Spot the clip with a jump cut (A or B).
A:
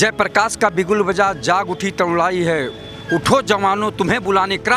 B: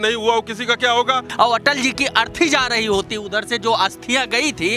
B